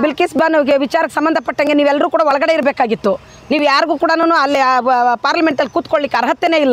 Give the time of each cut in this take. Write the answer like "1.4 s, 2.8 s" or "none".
none

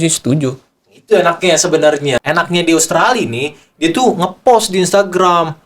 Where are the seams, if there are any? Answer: 2.2 s

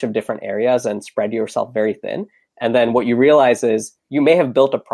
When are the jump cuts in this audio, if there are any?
4.0 s

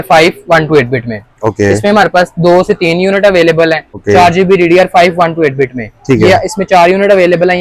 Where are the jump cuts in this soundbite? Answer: 3.9 s

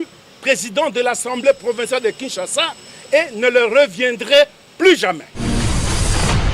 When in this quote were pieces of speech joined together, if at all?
5.3 s

